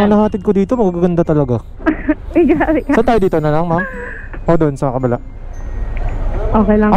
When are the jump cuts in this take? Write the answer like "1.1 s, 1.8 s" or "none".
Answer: none